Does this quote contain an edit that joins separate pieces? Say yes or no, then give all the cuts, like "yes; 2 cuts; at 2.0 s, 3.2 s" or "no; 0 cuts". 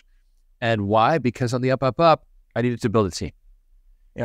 yes; 1 cut; at 2.4 s